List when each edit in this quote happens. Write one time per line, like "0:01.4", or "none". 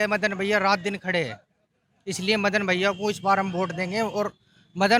none